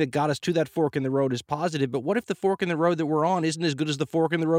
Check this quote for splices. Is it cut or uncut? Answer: uncut